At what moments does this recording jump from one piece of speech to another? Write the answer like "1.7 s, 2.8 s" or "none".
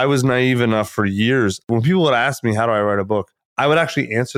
1.7 s, 3.4 s